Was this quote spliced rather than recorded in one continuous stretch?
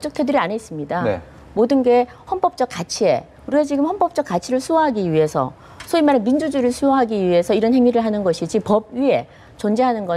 no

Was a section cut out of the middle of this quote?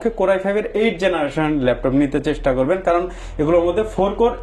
no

